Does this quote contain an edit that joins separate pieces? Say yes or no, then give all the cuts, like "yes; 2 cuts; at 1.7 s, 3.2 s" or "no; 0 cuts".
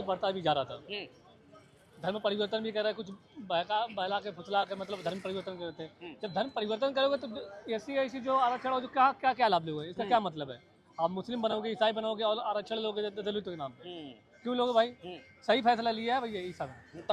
no; 0 cuts